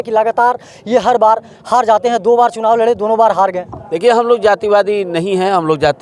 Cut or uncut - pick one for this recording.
uncut